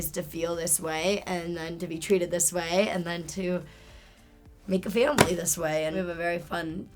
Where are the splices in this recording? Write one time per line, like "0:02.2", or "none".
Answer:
0:06.0